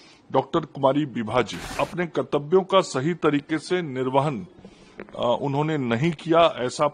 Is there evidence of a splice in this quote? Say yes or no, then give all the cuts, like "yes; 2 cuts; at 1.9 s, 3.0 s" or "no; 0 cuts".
yes; 1 cut; at 1.6 s